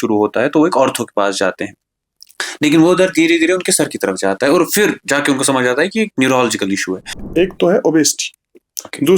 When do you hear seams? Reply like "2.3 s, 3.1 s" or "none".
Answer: 7.2 s